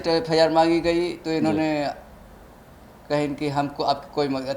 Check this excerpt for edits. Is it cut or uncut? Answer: uncut